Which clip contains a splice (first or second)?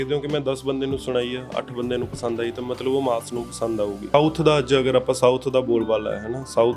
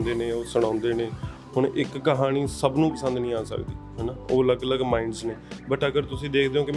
first